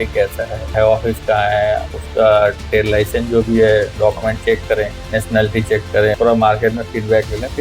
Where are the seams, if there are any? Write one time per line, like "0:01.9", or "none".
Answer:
0:00.7
0:02.0
0:05.0
0:06.1

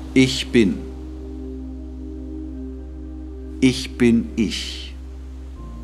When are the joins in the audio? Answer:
0:00.8
0:03.6
0:04.6

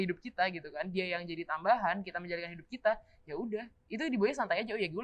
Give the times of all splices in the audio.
none

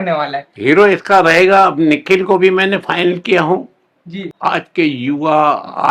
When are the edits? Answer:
0:04.3

